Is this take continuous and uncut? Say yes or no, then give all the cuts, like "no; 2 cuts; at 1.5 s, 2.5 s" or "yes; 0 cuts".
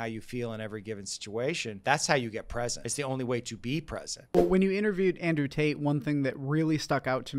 no; 3 cuts; at 1.7 s, 2.9 s, 4.3 s